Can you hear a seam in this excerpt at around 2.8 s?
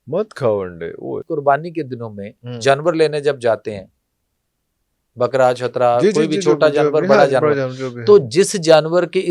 no; 1 cut; at 1.2 s

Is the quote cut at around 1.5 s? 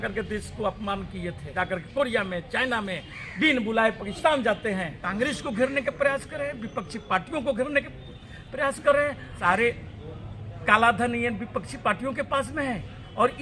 yes; 3 cuts; at 1.5 s, 5.0 s, 9.4 s

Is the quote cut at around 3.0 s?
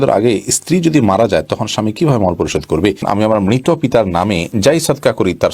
yes; 1 cut; at 3.0 s

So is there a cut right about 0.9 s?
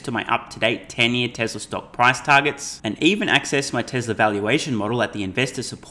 no; 0 cuts

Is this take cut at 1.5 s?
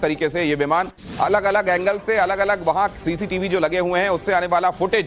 yes; 1 cut; at 1.5 s

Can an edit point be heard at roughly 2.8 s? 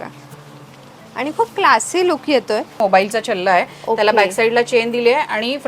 yes; 1 cut; at 2.8 s

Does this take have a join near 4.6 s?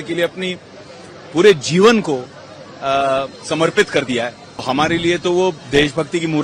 yes; 1 cut; at 4.6 s

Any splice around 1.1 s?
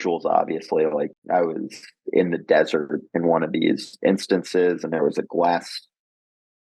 yes; 1 cut; at 1.1 s

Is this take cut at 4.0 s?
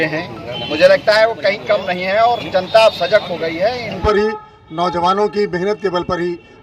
yes; 1 cut; at 4.0 s

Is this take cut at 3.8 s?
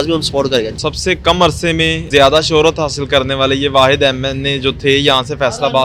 no; 2 cuts; at 0.8 s, 2.0 s

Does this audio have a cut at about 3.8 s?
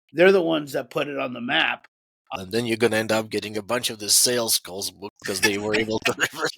no; 1 cut; at 2.3 s

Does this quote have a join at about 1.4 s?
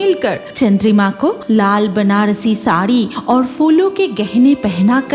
yes; 1 cut; at 1.4 s

